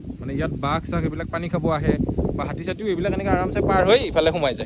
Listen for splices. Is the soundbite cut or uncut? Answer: uncut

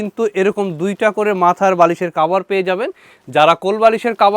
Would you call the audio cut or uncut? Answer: uncut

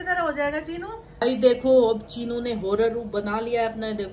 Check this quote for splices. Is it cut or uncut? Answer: cut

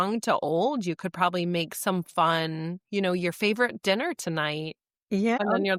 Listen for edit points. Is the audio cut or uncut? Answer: uncut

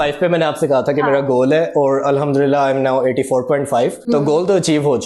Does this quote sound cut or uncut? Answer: cut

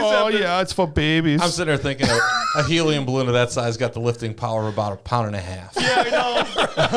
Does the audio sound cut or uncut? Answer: uncut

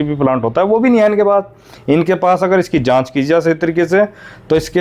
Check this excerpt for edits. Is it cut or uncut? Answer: uncut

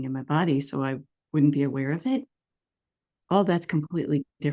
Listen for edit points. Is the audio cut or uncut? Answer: uncut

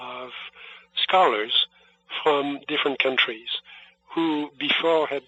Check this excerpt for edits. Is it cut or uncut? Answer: uncut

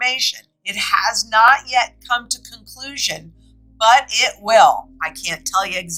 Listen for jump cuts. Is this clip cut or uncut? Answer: uncut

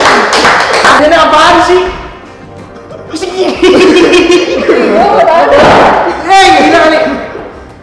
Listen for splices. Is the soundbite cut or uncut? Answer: cut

